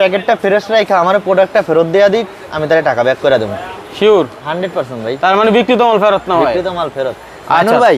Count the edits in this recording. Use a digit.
0